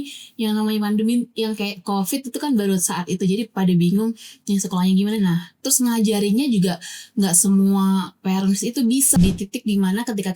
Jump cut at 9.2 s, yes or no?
yes